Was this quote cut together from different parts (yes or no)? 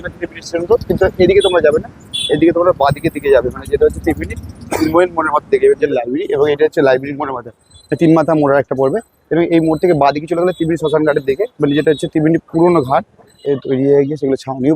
yes